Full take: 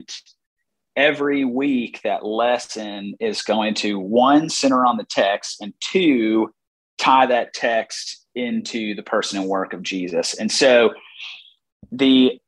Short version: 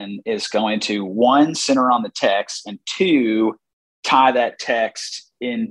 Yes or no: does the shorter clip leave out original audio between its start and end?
no